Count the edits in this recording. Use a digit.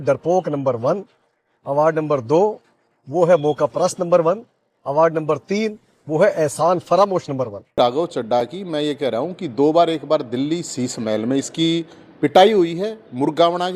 1